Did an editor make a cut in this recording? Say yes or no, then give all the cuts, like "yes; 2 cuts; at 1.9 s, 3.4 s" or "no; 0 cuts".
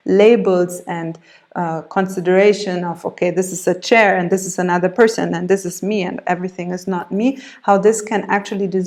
no; 0 cuts